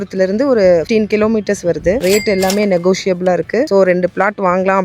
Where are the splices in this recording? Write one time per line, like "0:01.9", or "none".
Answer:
0:02.0